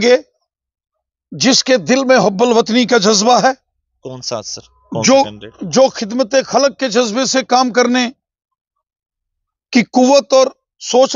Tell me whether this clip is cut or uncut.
uncut